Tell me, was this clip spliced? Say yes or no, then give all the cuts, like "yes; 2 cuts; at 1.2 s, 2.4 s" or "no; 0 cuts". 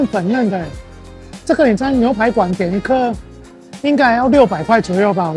no; 0 cuts